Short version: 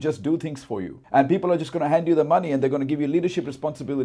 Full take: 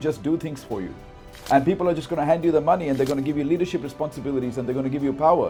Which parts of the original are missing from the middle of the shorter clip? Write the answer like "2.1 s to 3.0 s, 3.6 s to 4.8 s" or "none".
0.9 s to 1.3 s